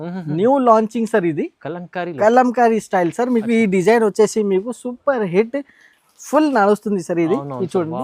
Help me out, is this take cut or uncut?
uncut